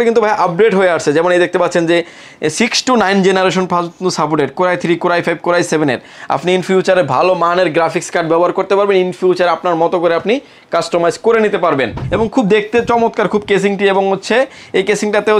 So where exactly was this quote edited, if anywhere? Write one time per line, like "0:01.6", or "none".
0:12.0